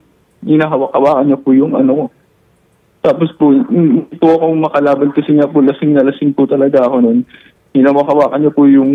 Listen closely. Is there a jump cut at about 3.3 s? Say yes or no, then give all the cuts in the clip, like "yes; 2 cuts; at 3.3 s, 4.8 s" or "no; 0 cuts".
no; 1 cut; at 7.5 s